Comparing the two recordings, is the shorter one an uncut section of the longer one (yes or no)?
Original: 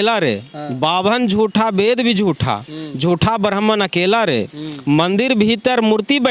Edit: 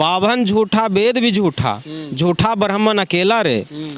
yes